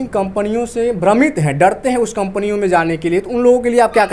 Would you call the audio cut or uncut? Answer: uncut